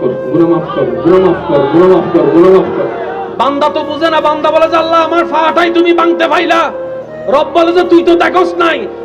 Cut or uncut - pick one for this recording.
uncut